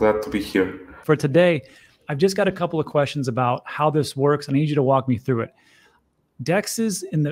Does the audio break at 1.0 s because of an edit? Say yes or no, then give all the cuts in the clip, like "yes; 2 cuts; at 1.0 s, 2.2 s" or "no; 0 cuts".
yes; 1 cut; at 1.0 s